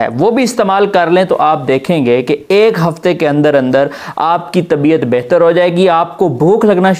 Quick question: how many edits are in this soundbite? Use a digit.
0